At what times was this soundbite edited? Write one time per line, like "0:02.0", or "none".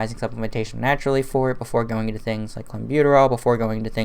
none

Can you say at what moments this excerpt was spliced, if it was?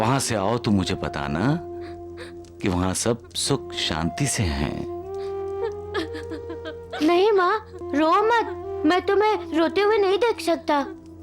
none

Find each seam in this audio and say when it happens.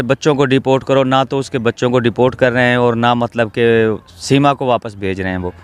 none

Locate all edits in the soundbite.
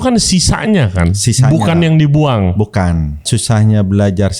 0:03.3

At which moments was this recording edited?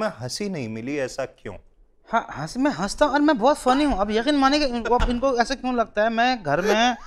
none

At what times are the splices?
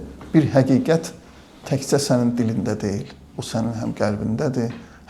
none

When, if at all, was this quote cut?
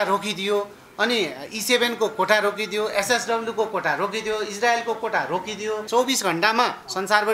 0:05.8

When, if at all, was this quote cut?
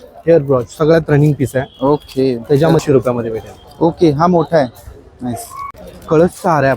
0:02.8
0:05.5

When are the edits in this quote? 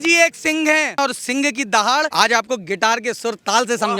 0:01.0
0:02.1

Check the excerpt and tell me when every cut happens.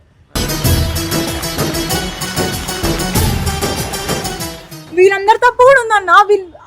0:04.8

